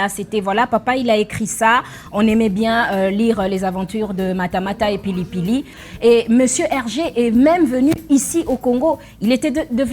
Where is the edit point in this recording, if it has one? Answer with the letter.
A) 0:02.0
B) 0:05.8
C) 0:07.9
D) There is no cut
B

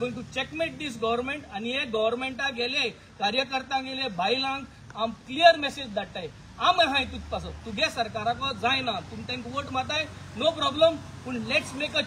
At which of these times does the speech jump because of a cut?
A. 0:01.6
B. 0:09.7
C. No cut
C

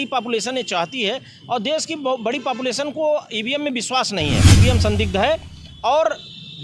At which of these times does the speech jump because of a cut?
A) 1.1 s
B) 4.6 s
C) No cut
B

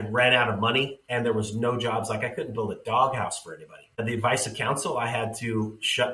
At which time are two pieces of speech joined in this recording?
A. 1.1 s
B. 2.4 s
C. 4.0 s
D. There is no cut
C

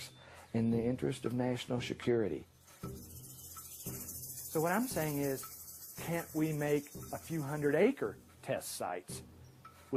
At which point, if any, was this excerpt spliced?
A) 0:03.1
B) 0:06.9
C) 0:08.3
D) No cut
D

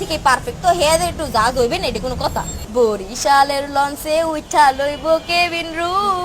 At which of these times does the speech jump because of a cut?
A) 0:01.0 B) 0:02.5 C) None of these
B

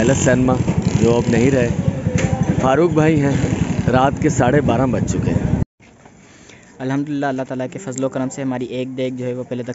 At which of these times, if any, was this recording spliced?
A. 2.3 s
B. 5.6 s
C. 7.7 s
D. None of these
B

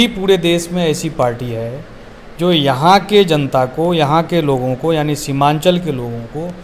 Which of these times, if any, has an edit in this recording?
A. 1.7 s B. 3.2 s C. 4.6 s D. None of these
D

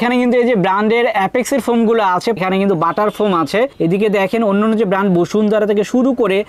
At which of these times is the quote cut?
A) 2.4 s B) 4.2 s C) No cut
A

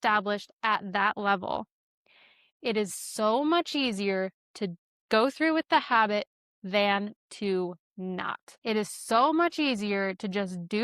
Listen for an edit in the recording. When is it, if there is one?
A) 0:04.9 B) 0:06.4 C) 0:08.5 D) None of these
C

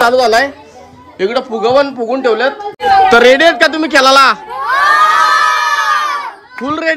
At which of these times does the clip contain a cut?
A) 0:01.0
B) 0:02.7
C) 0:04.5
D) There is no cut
B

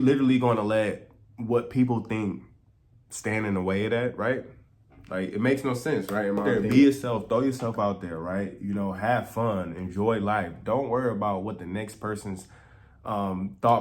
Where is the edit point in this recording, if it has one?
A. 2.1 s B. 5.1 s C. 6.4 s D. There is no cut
C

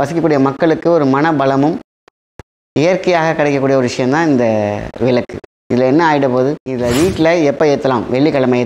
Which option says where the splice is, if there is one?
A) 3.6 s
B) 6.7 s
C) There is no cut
B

